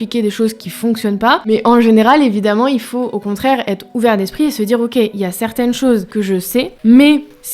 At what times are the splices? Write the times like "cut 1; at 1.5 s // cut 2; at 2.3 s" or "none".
cut 1; at 1.5 s // cut 2; at 6.4 s